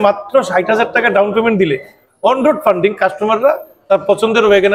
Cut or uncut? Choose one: uncut